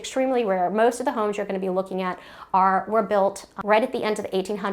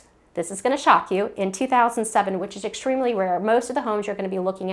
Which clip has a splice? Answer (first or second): first